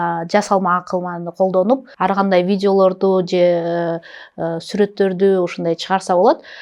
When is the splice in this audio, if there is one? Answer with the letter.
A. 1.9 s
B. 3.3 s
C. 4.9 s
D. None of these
A